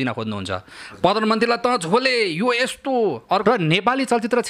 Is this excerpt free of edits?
no; 1 cut; at 3.4 s

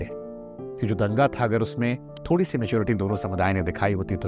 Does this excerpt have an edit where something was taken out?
no; 0 cuts

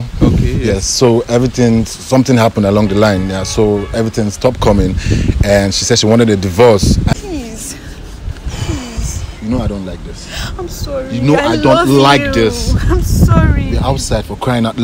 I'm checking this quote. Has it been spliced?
yes; 1 cut; at 7.1 s

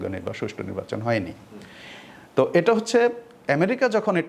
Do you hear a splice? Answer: no; 0 cuts

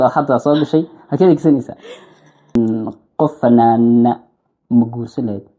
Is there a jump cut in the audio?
yes; 1 cut; at 2.6 s

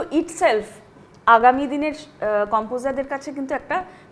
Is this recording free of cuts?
yes; 0 cuts

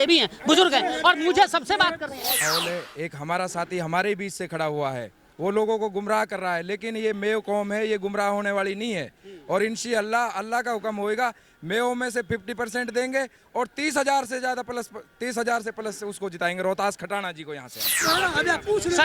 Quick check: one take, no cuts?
no; 2 cuts; at 2.4 s, 18.0 s

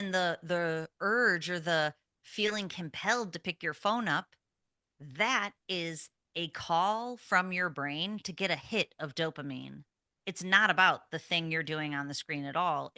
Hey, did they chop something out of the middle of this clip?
no; 0 cuts

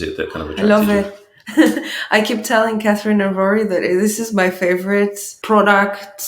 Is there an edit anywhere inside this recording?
yes; 1 cut; at 5.3 s

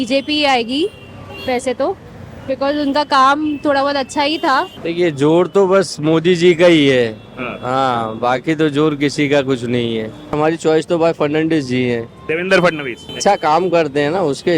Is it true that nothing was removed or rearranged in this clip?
no; 3 cuts; at 4.8 s, 10.3 s, 13.2 s

